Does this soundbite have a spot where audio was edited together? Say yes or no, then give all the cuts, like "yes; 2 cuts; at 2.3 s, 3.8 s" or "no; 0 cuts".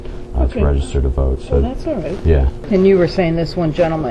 yes; 1 cut; at 2.6 s